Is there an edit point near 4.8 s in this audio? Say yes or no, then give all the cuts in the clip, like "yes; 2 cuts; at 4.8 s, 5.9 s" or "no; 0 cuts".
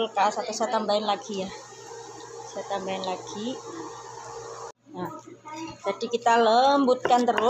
yes; 1 cut; at 4.8 s